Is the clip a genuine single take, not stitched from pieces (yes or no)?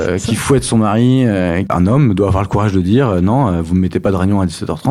no